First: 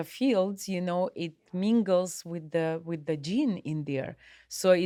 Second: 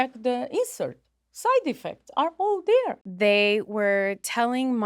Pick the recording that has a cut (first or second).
second